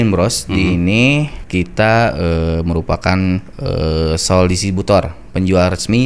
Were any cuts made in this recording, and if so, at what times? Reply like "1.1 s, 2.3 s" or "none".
1.4 s, 3.5 s